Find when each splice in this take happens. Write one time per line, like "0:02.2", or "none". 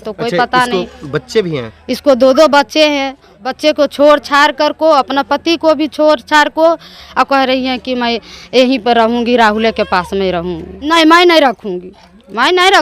0:03.5
0:07.0
0:10.9